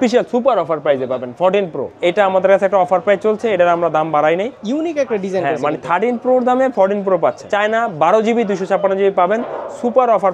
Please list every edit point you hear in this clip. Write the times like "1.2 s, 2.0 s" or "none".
2.0 s, 4.6 s, 7.5 s

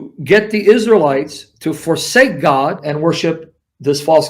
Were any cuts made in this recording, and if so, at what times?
2.8 s

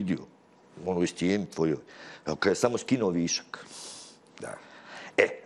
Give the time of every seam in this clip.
none

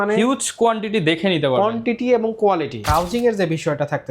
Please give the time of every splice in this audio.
2.8 s

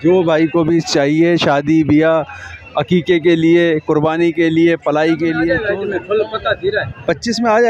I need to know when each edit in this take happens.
5.5 s

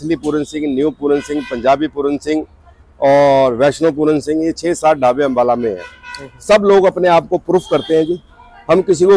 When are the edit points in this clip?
none

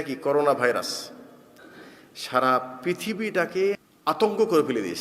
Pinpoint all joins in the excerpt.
3.9 s

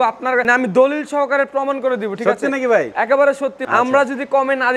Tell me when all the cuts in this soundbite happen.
3.6 s

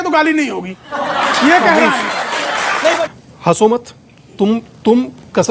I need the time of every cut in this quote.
3.0 s

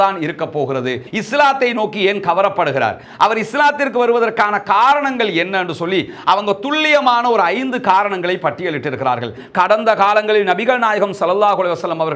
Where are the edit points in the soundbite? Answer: 1.0 s, 9.4 s

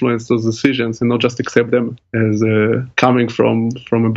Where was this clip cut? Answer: 2.0 s, 2.9 s

